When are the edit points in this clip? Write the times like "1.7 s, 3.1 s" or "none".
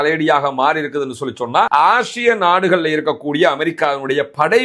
1.7 s